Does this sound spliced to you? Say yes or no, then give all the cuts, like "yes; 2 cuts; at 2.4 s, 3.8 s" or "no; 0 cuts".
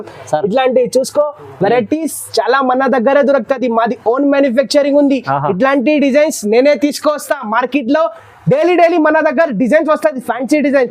no; 0 cuts